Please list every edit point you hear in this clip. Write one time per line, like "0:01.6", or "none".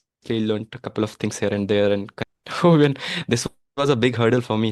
0:02.2